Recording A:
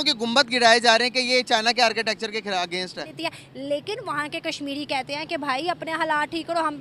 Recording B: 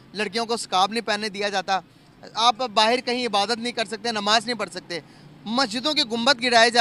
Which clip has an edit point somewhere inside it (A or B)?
A